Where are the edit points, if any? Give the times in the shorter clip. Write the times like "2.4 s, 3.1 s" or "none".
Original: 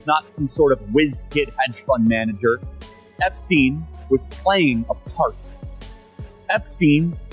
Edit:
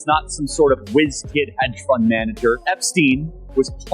2.6 s